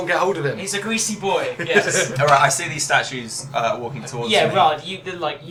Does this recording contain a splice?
no; 0 cuts

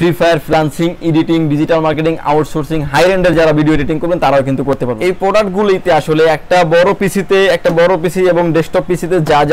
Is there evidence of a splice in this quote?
yes; 1 cut; at 4.9 s

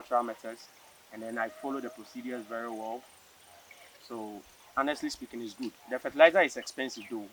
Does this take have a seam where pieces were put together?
no; 0 cuts

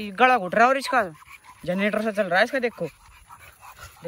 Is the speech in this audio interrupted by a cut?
no; 0 cuts

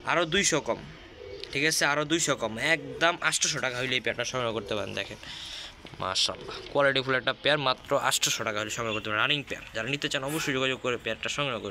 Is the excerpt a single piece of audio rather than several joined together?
yes; 0 cuts

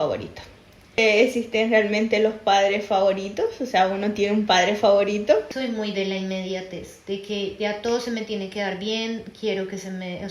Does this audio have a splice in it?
yes; 2 cuts; at 1.0 s, 5.5 s

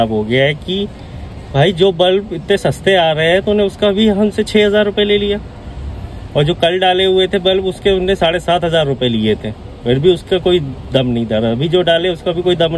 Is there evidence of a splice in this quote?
no; 0 cuts

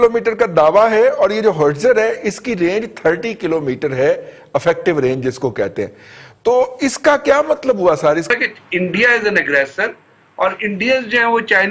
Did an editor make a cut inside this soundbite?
yes; 1 cut; at 8.3 s

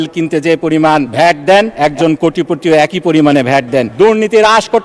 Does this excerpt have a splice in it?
yes; 3 cuts; at 1.1 s, 1.7 s, 3.9 s

